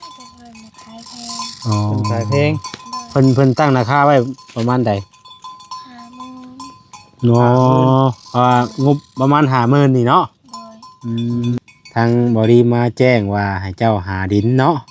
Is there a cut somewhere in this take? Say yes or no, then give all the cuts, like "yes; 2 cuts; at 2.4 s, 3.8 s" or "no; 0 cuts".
yes; 1 cut; at 11.6 s